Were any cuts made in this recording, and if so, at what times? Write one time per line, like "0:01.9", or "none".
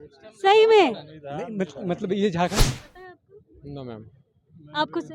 0:02.6